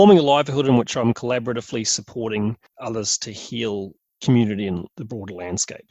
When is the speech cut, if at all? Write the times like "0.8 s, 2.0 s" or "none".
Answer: 2.7 s, 4.9 s